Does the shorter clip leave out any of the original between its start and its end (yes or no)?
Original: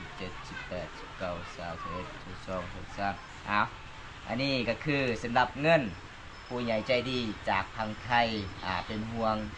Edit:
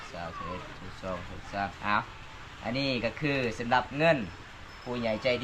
yes